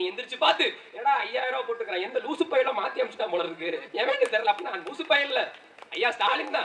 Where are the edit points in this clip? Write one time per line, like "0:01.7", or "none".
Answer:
none